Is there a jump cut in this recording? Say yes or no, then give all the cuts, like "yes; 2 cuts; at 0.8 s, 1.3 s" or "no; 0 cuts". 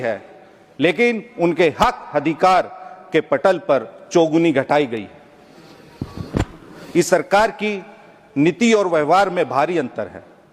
no; 0 cuts